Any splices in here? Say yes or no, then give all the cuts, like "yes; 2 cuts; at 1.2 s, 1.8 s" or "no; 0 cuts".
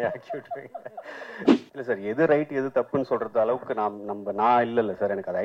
yes; 1 cut; at 1.5 s